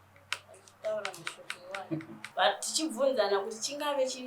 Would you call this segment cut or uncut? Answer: cut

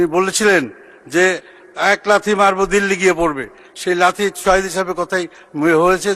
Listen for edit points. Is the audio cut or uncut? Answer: uncut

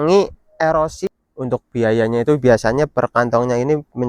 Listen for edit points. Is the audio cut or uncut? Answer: cut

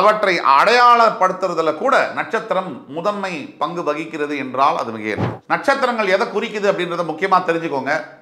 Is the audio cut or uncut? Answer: cut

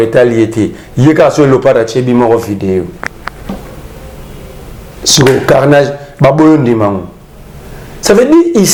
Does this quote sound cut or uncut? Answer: uncut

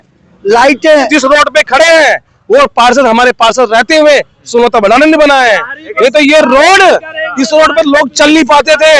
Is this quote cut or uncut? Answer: cut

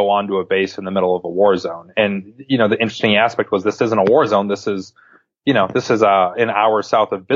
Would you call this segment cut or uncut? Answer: uncut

